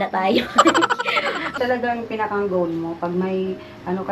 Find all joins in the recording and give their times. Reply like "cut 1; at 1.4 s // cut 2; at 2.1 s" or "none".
cut 1; at 1.6 s